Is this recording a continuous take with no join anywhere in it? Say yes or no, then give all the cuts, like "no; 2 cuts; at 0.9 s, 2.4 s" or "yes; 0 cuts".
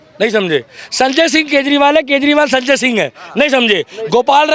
yes; 0 cuts